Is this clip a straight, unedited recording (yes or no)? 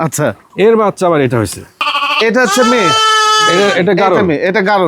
no